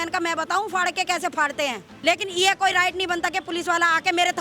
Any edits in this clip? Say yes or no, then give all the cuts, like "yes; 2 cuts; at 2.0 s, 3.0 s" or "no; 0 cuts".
yes; 1 cut; at 1.9 s